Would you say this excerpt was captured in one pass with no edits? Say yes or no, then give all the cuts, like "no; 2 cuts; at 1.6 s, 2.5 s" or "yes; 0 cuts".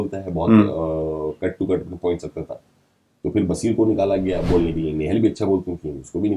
yes; 0 cuts